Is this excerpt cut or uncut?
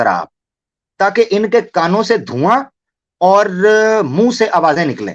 uncut